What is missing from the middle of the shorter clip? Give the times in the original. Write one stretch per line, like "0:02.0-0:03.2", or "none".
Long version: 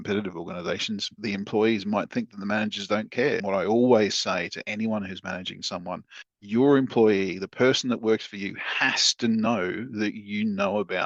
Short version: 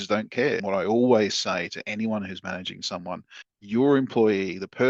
none